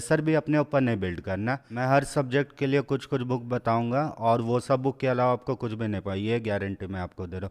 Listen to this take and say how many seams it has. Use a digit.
1